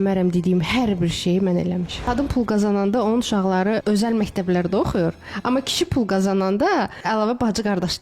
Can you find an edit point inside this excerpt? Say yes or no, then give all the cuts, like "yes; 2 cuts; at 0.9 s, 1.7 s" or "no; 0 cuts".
yes; 3 cuts; at 2.1 s, 3.8 s, 7.0 s